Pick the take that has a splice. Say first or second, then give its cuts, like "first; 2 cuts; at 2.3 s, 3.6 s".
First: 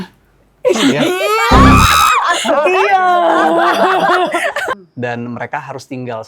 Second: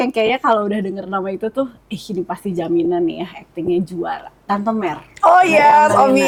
first; 1 cut; at 4.7 s